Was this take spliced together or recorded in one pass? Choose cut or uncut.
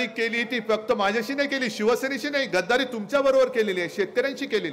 uncut